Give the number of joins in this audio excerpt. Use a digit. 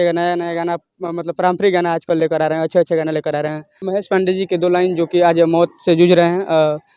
1